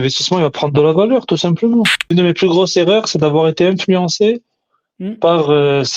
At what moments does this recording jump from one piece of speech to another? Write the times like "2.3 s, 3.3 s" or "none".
2.1 s